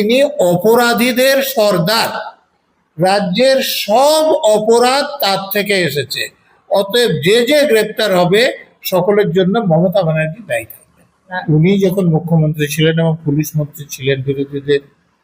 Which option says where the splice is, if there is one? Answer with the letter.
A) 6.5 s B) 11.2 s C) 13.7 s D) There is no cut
B